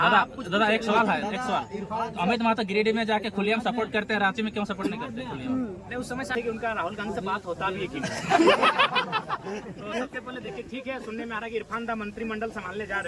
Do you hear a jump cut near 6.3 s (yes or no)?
yes